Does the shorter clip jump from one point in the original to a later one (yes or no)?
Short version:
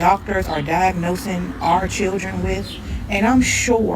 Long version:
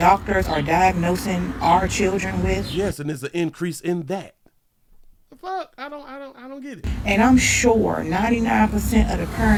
yes